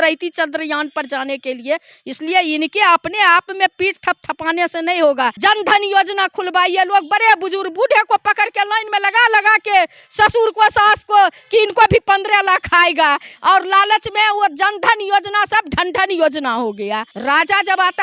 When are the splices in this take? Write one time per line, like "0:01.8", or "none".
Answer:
0:05.4
0:17.1